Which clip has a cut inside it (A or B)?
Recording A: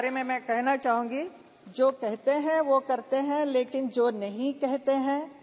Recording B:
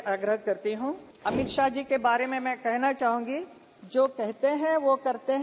B